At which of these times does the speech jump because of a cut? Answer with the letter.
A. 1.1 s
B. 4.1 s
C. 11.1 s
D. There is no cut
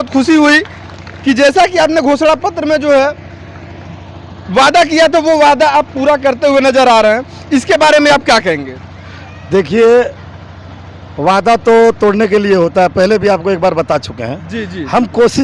D